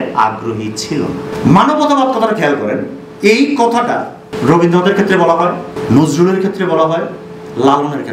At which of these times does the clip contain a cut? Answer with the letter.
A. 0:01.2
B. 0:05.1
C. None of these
A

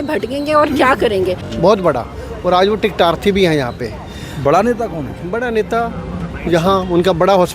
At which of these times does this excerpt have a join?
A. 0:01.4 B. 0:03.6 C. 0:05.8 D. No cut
A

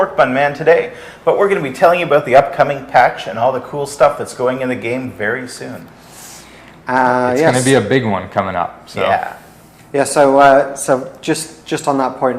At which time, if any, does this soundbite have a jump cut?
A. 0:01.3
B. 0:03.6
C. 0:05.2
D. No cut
C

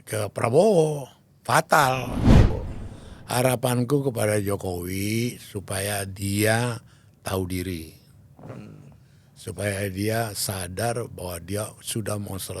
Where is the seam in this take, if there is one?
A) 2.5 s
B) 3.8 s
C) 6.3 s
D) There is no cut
A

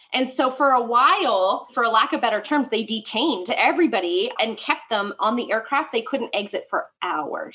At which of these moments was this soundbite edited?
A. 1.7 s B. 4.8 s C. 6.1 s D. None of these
A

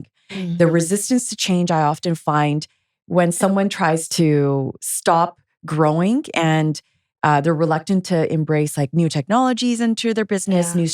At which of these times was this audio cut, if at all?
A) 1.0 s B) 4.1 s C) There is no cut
B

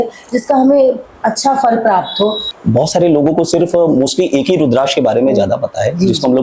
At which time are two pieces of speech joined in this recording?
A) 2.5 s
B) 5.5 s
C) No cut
A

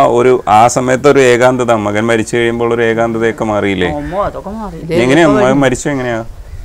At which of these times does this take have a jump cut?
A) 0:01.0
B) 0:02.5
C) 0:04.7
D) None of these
C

